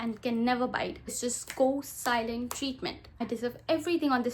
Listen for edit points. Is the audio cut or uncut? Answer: cut